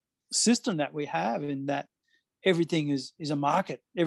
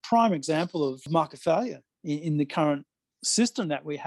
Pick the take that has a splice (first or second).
second